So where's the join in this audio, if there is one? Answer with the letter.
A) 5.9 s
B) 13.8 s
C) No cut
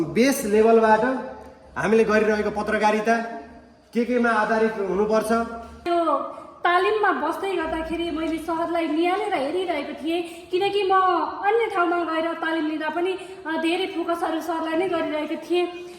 A